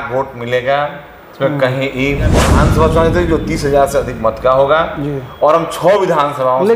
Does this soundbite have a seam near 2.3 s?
yes; 1 cut; at 2.3 s

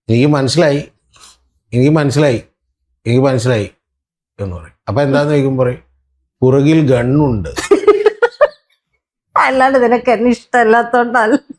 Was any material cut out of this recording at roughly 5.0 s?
no; 0 cuts

